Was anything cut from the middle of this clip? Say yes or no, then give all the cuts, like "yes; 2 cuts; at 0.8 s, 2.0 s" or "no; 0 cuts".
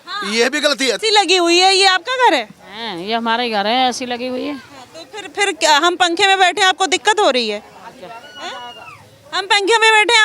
yes; 1 cut; at 1.0 s